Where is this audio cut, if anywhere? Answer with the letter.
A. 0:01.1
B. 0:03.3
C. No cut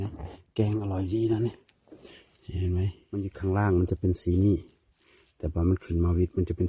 B